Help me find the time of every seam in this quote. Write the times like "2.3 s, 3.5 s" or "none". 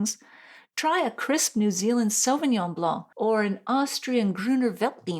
3.1 s